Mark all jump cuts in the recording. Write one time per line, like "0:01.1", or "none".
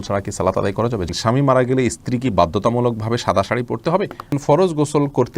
0:01.1
0:04.4